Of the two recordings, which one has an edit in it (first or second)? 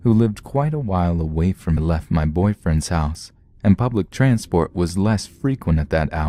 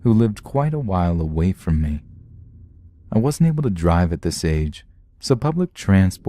second